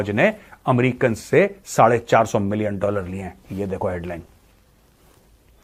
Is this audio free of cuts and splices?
yes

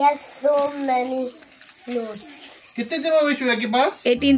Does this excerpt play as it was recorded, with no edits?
yes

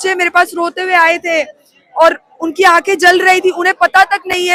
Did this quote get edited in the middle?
no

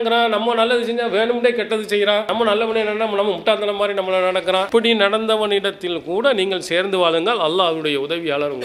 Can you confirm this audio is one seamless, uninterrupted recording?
yes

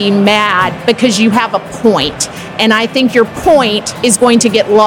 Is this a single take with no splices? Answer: yes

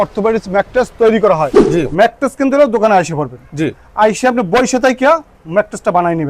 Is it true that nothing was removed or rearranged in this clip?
no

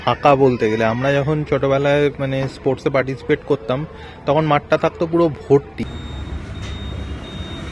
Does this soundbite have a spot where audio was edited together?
yes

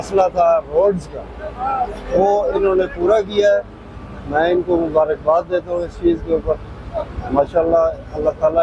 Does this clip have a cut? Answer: no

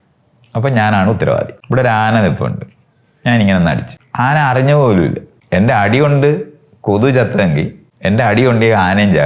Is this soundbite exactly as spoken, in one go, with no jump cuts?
no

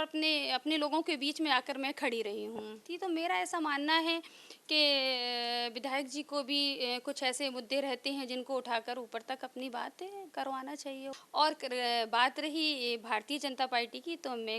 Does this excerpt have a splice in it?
yes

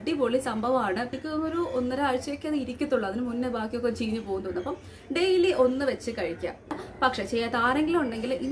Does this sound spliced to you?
yes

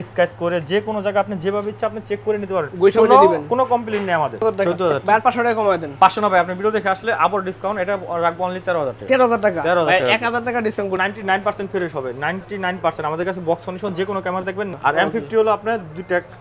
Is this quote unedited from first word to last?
no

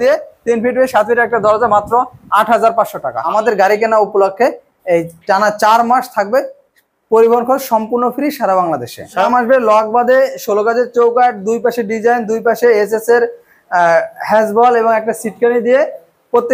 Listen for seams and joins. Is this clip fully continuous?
no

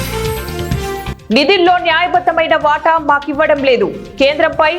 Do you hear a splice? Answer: yes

